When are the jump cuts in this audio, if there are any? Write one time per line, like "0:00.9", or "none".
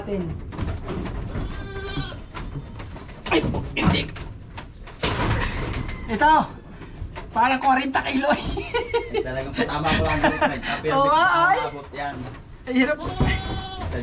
none